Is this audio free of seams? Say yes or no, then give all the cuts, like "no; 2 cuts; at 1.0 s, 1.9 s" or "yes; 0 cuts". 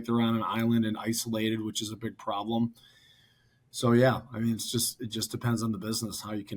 yes; 0 cuts